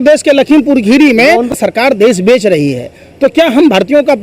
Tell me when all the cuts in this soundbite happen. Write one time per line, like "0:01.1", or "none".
0:01.5

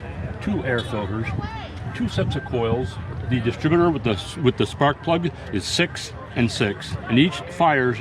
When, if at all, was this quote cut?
0:06.9

